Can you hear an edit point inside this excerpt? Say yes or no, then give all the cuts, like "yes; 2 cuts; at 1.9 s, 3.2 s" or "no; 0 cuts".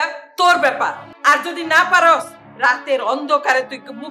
yes; 1 cut; at 1.1 s